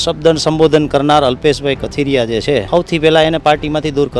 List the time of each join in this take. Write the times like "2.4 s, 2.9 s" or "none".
2.7 s